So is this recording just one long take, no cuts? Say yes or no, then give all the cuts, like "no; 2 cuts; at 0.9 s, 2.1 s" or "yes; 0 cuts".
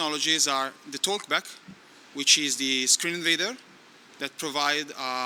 yes; 0 cuts